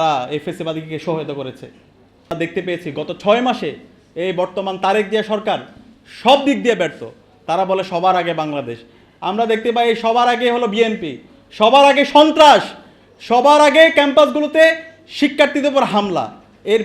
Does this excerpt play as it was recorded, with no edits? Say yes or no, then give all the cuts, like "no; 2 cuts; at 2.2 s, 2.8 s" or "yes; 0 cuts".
no; 1 cut; at 2.3 s